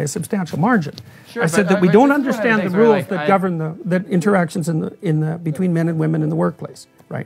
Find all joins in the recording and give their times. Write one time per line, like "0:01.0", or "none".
none